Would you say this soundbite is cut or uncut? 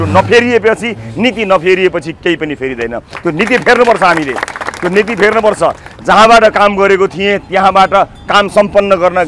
uncut